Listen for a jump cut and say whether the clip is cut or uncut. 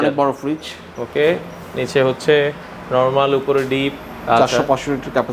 uncut